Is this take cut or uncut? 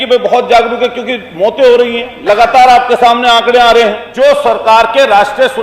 cut